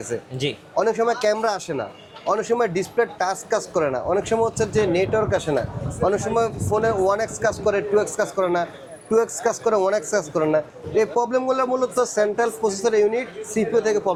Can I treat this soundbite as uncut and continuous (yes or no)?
yes